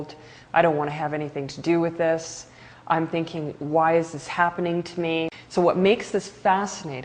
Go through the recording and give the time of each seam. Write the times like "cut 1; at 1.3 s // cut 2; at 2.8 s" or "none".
cut 1; at 5.4 s